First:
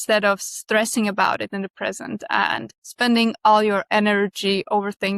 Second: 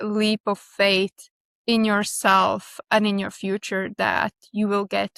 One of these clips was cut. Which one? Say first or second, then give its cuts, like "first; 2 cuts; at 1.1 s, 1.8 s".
first; 1 cut; at 2.8 s